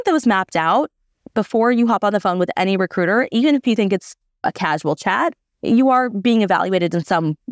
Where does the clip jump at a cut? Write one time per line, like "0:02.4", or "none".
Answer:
0:04.4